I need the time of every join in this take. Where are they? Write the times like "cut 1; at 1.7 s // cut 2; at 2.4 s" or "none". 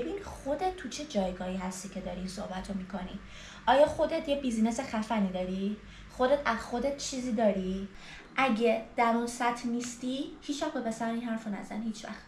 cut 1; at 7.9 s